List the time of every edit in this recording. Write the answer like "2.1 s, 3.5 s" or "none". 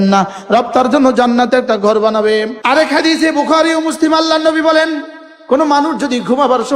2.5 s